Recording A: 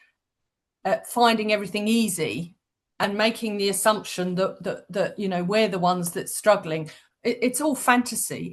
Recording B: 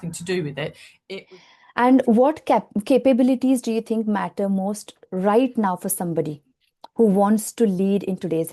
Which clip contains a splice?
B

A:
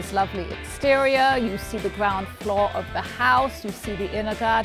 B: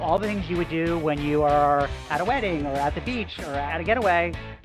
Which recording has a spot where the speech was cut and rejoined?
B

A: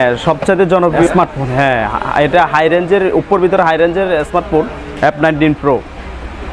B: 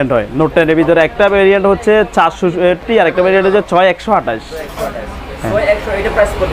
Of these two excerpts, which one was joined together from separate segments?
A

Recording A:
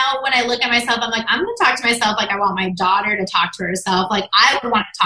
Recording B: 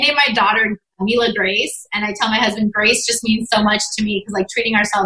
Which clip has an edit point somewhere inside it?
B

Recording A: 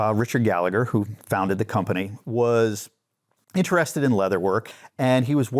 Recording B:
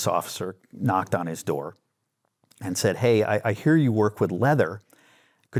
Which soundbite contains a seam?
A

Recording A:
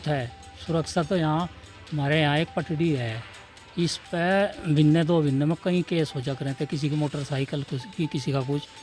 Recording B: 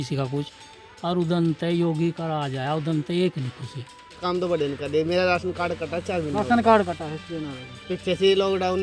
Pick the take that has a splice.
B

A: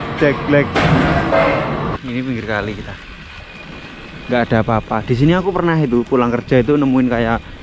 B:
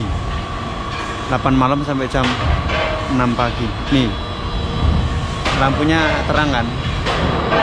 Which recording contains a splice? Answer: A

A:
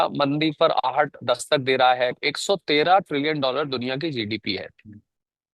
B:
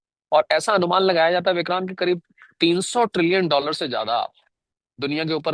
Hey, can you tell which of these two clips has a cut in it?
A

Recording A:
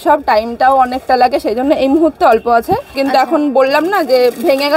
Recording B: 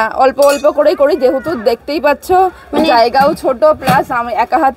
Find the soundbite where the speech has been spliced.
A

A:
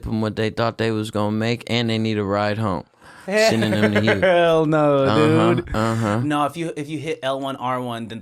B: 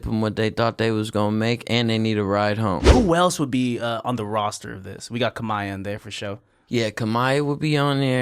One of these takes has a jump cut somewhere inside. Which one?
B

